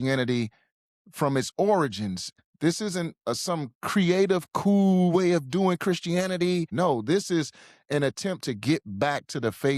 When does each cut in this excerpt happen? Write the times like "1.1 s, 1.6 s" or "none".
2.3 s, 6.7 s